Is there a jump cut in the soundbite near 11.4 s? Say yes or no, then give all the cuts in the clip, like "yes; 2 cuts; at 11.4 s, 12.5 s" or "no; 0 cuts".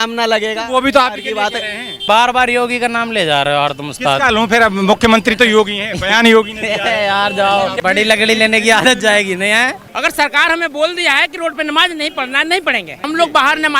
no; 4 cuts; at 2.0 s, 7.8 s, 9.8 s, 13.0 s